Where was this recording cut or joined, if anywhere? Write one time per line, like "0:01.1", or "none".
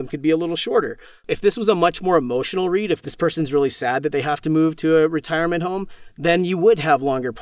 none